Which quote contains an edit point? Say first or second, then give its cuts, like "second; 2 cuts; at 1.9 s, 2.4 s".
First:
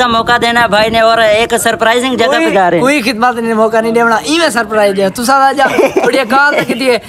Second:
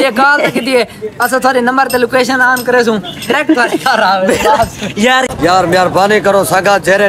second; 1 cut; at 5.3 s